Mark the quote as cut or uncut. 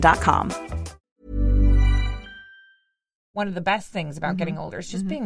cut